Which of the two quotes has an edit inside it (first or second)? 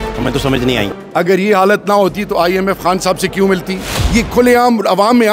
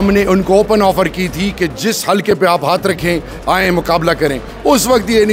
first